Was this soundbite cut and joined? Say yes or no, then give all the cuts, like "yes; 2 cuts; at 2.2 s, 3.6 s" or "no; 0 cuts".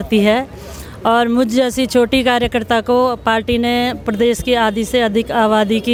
no; 0 cuts